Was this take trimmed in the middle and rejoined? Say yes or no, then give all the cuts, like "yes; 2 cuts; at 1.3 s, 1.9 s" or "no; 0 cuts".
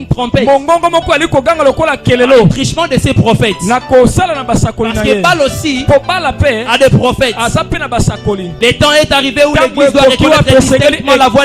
yes; 1 cut; at 8.5 s